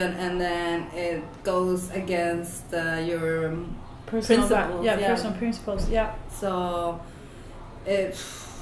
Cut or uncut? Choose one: uncut